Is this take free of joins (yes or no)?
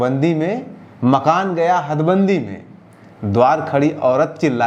yes